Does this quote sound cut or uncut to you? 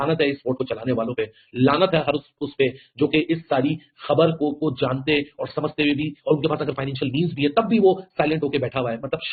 uncut